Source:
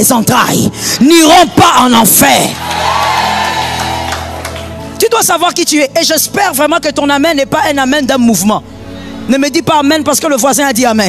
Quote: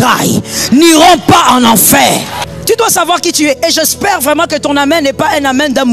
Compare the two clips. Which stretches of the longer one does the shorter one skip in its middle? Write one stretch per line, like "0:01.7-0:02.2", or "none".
0:02.7-0:04.7